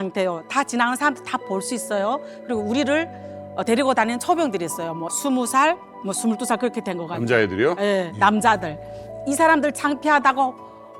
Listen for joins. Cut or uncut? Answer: uncut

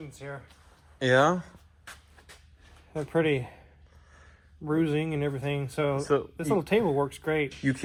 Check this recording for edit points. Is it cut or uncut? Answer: uncut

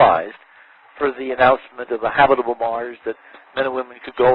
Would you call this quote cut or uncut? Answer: cut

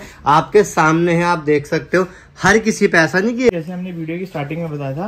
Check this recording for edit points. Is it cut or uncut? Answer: cut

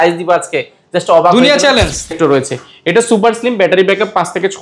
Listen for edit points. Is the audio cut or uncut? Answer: cut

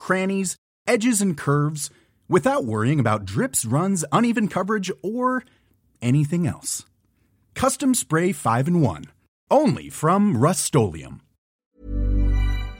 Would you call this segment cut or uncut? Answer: cut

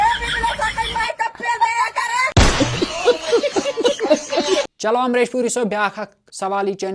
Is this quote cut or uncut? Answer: uncut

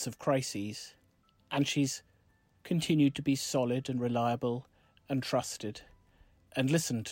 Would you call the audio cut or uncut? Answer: uncut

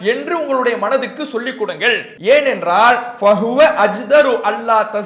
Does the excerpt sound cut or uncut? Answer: cut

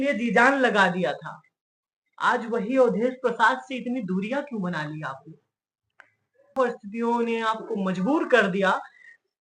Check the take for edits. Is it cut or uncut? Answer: cut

